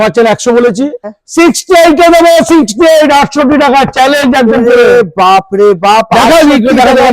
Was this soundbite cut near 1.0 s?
yes; 1 cut; at 1.0 s

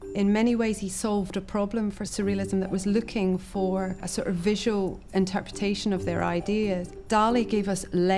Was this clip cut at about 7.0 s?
no; 0 cuts

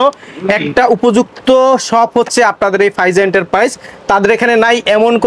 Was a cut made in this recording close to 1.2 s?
no; 0 cuts

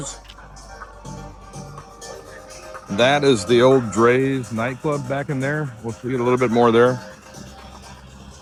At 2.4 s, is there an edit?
no; 0 cuts

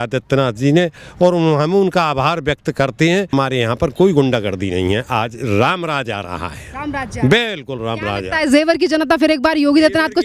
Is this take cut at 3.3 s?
yes; 1 cut; at 3.3 s

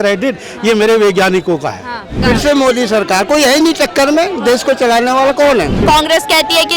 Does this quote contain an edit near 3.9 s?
no; 2 cuts; at 2.2 s, 5.8 s

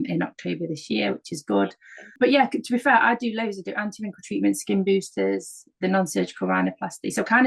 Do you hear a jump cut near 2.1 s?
yes; 1 cut; at 2.1 s

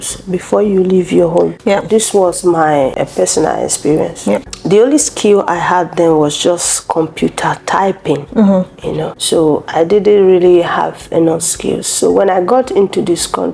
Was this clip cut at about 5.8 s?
no; 4 cuts; at 1.6 s, 2.9 s, 4.5 s, 9.1 s

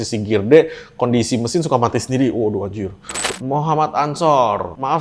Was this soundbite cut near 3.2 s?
yes; 1 cut; at 3.2 s

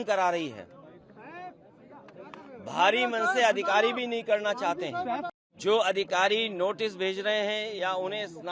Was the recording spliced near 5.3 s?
yes; 1 cut; at 5.3 s

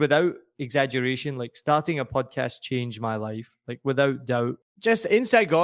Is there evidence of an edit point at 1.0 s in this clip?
no; 1 cut; at 4.7 s

